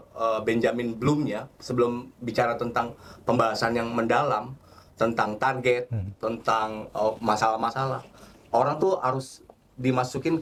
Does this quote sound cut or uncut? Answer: uncut